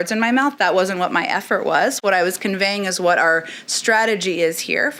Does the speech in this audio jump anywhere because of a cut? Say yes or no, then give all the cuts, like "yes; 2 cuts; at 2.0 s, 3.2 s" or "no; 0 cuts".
no; 0 cuts